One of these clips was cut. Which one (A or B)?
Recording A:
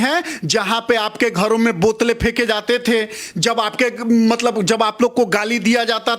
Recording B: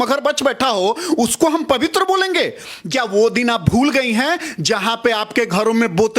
B